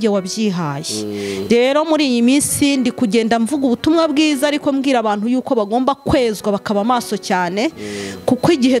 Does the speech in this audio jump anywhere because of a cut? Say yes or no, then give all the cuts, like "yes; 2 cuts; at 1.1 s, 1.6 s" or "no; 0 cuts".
no; 0 cuts